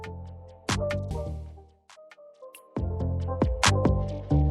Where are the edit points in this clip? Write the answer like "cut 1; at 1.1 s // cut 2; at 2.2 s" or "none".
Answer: cut 1; at 1.1 s